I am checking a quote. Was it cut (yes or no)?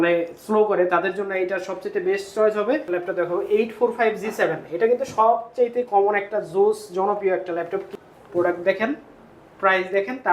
yes